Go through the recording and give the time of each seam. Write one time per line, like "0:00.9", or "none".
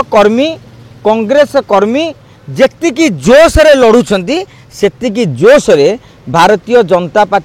none

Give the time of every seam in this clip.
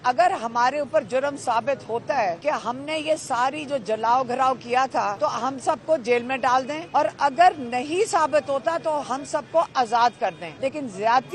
0:02.4
0:05.1
0:06.8
0:10.5

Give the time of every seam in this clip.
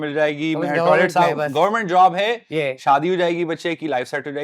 none

